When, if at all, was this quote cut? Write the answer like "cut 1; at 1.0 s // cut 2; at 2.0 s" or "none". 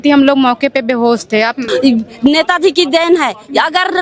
cut 1; at 1.6 s